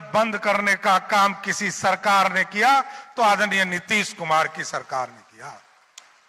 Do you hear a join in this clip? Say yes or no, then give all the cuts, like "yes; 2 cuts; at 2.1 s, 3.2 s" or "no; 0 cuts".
no; 0 cuts